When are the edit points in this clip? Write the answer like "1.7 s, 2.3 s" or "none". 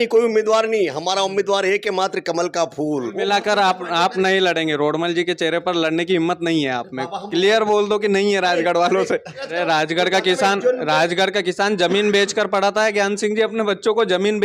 3.1 s, 9.5 s